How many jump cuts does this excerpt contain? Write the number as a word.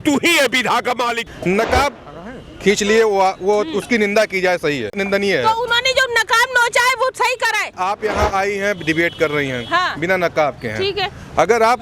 three